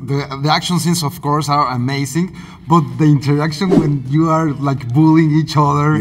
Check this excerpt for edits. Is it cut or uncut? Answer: uncut